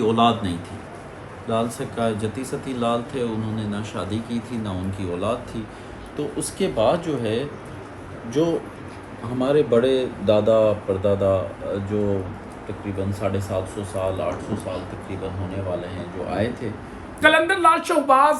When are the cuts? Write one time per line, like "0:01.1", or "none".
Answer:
0:17.1